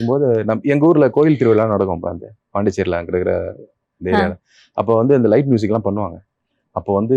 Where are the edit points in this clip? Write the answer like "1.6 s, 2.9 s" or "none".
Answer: none